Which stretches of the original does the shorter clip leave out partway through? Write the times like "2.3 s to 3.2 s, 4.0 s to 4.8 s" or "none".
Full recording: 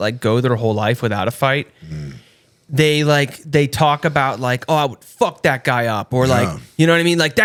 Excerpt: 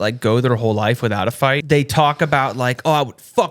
1.6 s to 3.5 s